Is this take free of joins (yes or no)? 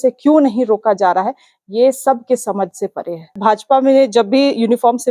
no